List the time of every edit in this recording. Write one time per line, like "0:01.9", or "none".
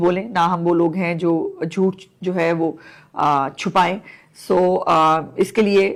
none